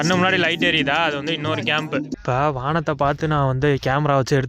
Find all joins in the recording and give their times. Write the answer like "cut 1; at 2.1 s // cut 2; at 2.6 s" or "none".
none